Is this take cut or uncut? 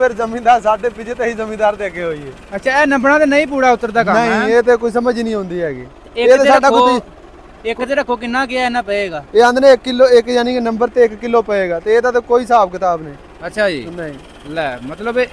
uncut